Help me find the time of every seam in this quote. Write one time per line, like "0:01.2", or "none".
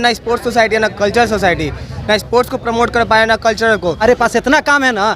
0:04.0